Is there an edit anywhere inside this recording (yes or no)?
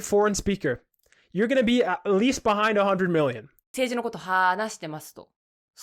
yes